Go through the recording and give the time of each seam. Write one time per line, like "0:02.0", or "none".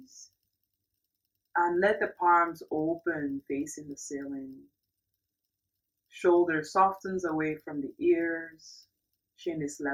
none